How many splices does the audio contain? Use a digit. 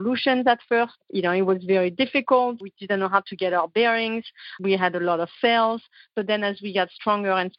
3